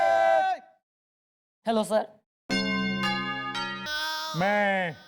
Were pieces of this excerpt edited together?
yes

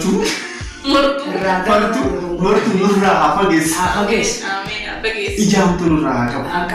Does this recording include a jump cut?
no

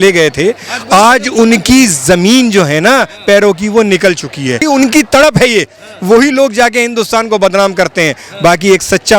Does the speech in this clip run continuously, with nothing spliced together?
no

